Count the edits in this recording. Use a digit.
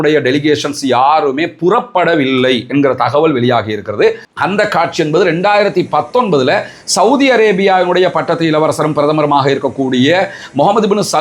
1